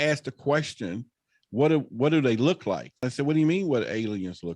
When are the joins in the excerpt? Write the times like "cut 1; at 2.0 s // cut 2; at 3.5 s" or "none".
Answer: cut 1; at 3.1 s